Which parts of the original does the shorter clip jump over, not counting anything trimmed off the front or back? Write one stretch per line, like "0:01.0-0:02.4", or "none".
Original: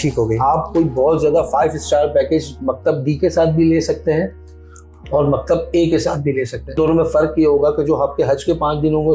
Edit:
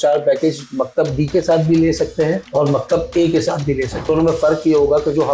0:04.3-0:05.0
0:06.6-0:06.7